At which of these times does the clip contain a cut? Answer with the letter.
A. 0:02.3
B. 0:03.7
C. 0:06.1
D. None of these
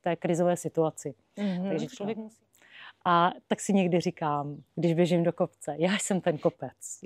A